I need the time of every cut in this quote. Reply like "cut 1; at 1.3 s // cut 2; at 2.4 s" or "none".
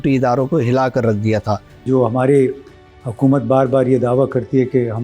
cut 1; at 1.8 s